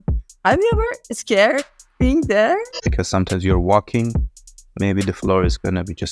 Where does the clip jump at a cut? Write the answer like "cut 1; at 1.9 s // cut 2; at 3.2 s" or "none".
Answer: cut 1; at 2.8 s